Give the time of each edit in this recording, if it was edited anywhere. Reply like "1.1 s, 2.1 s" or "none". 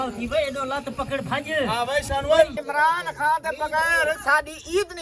2.6 s